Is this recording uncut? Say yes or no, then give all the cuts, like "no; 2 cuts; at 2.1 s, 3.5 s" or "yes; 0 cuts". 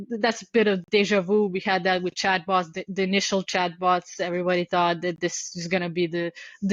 yes; 0 cuts